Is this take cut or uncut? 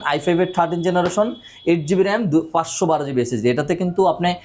uncut